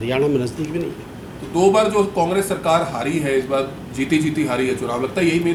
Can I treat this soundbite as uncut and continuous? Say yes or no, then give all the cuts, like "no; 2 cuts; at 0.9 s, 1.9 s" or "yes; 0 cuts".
yes; 0 cuts